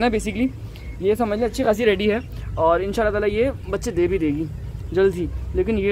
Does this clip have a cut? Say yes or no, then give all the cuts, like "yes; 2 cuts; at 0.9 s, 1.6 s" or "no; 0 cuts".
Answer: no; 0 cuts